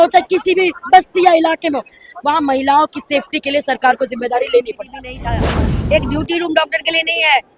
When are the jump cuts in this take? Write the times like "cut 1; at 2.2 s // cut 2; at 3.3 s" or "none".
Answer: cut 1; at 5.4 s